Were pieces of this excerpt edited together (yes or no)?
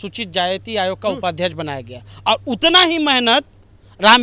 no